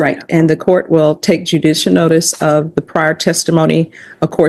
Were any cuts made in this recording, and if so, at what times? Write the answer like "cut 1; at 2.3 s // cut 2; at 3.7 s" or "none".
none